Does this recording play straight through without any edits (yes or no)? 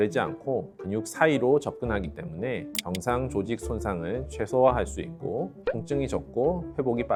yes